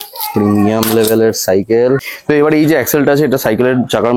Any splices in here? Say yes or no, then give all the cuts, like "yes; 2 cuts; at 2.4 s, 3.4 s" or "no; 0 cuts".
yes; 1 cut; at 2.1 s